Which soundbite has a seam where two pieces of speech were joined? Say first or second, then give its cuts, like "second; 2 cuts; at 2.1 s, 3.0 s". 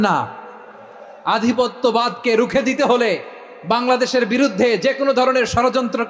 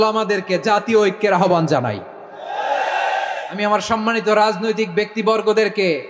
second; 1 cut; at 3.5 s